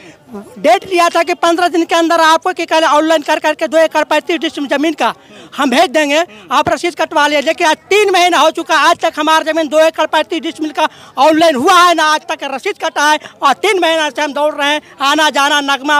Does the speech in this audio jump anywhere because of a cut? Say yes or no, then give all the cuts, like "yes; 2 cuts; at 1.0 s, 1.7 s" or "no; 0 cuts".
no; 0 cuts